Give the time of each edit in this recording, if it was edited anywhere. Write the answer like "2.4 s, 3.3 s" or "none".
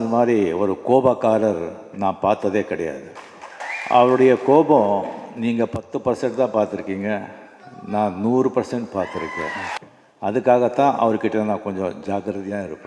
3.7 s, 9.8 s